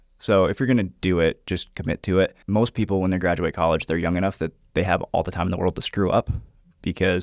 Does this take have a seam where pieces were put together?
yes; 1 cut; at 2.4 s

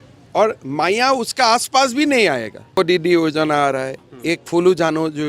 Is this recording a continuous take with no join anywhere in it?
no; 1 cut; at 2.8 s

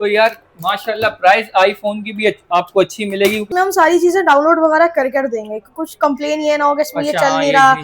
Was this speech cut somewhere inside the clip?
yes; 1 cut; at 3.4 s

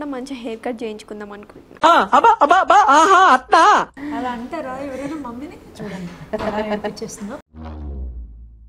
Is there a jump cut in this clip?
yes; 1 cut; at 3.9 s

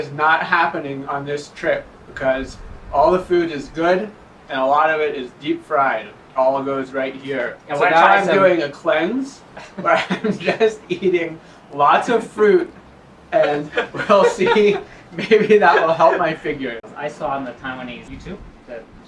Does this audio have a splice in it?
yes; 2 cuts; at 16.9 s, 18.1 s

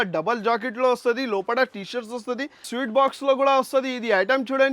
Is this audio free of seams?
no; 1 cut; at 2.7 s

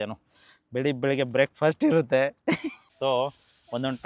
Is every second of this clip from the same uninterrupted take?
no; 1 cut; at 2.8 s

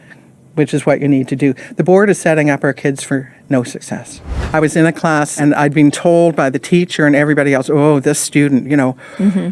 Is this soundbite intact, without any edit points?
no; 2 cuts; at 4.4 s, 5.4 s

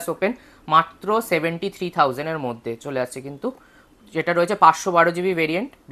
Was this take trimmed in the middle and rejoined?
no; 0 cuts

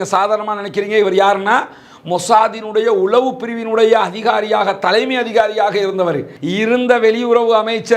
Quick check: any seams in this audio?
yes; 1 cut; at 6.3 s

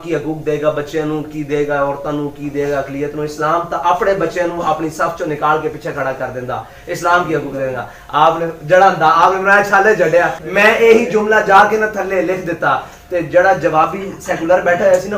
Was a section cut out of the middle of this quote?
yes; 1 cut; at 10.4 s

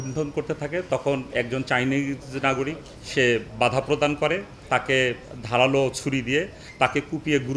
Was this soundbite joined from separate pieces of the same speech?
no; 0 cuts

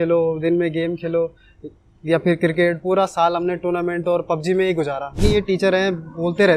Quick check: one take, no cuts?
no; 1 cut; at 5.2 s

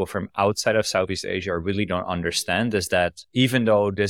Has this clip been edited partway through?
no; 0 cuts

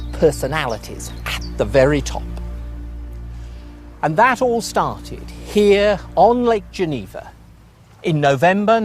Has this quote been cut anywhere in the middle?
yes; 1 cut; at 6.7 s

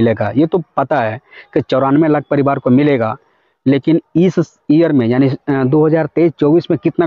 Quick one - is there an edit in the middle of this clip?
no; 0 cuts

